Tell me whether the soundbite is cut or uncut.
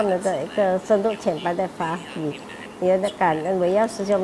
uncut